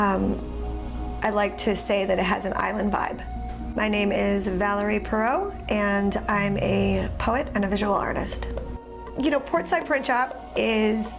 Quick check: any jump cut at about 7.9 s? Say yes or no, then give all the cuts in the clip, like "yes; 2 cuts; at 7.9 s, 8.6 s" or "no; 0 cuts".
no; 1 cut; at 6.5 s